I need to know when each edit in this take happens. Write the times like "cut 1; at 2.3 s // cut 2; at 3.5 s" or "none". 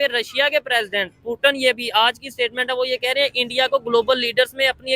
none